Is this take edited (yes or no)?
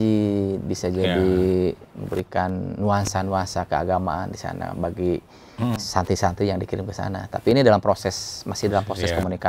no